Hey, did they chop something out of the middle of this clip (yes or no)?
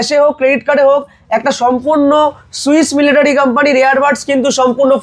no